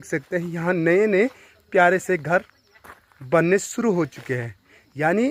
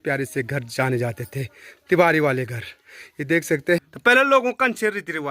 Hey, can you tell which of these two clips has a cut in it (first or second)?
second